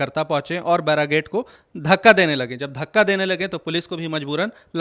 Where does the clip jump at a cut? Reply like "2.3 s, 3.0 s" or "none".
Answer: none